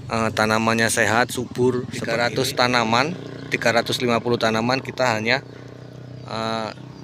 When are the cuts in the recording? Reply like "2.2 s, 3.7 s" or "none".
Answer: 2.0 s